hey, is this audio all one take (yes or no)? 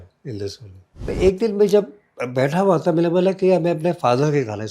no